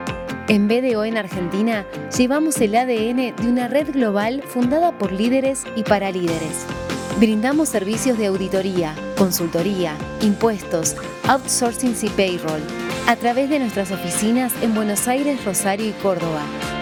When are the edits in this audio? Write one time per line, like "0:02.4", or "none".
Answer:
none